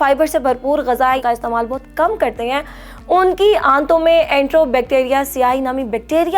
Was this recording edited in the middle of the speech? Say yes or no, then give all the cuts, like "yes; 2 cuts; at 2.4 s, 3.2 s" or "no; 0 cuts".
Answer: yes; 1 cut; at 1.2 s